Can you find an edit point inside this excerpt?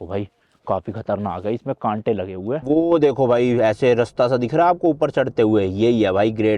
yes; 1 cut; at 2.6 s

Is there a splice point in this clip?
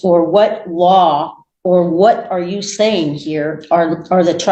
no; 0 cuts

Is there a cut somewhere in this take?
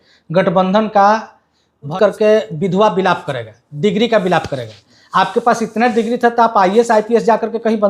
yes; 1 cut; at 1.9 s

